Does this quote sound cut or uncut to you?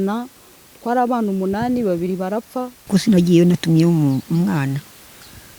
cut